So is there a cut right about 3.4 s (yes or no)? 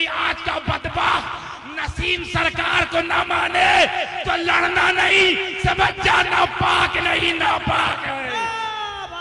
no